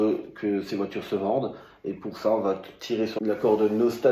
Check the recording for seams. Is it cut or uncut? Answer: cut